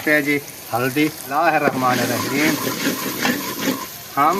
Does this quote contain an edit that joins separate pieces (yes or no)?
yes